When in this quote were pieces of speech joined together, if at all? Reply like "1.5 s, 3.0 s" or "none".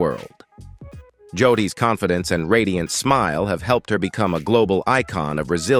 none